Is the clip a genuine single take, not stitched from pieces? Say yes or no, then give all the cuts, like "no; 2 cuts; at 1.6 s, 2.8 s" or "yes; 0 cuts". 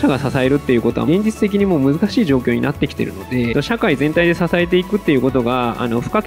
no; 2 cuts; at 1.0 s, 3.5 s